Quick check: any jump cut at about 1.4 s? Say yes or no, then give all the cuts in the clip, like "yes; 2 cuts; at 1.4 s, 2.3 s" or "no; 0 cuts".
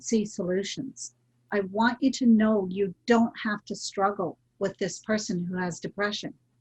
yes; 1 cut; at 1.4 s